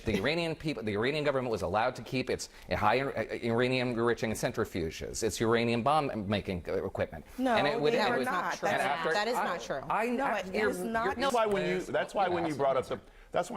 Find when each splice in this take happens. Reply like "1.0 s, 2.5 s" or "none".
11.3 s